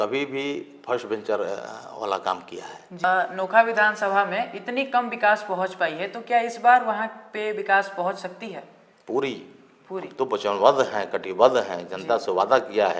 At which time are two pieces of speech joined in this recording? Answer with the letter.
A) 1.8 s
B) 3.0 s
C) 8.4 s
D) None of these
B